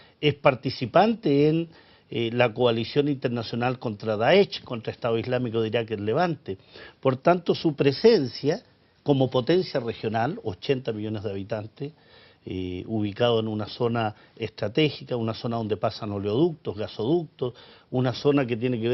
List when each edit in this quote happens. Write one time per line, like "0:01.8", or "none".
none